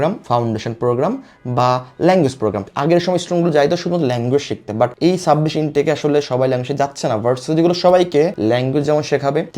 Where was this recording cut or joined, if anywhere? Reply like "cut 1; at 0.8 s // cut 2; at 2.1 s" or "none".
cut 1; at 2.7 s